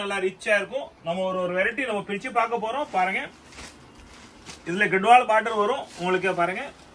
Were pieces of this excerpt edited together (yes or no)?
no